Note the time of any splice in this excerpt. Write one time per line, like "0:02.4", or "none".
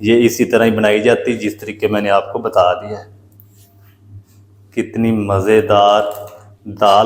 0:03.3